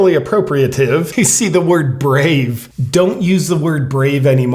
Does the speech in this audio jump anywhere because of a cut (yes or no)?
yes